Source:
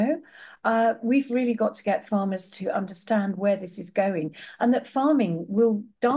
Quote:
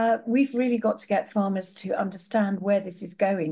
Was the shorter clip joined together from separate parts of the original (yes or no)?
no